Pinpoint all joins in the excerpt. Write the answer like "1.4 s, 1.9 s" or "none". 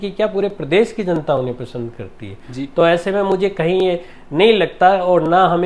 none